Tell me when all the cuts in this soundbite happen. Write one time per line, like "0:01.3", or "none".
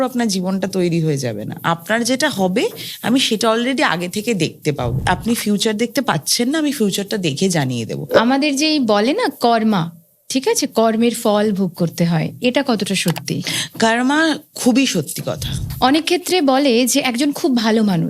0:05.1
0:08.0
0:15.5